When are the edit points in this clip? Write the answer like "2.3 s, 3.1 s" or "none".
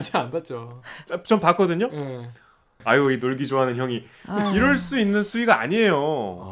none